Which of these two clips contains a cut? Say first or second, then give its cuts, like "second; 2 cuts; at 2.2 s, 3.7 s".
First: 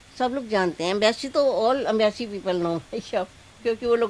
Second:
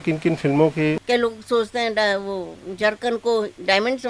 second; 1 cut; at 1.0 s